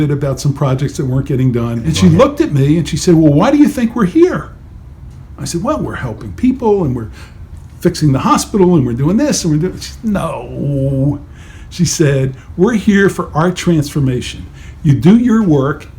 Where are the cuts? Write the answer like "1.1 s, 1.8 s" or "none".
1.8 s